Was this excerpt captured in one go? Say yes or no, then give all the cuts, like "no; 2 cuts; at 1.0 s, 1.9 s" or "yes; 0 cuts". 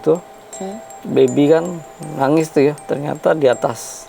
no; 1 cut; at 2.8 s